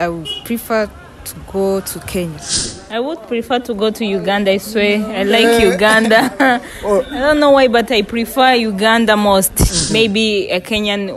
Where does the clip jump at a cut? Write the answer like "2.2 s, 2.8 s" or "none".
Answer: 2.7 s, 9.8 s